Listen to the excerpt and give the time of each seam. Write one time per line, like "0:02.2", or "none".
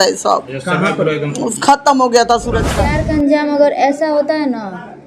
0:02.7